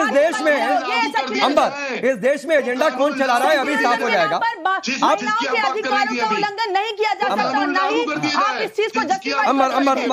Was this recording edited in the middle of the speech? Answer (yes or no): no